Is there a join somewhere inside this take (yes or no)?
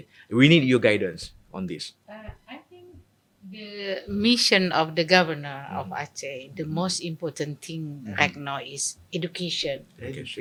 no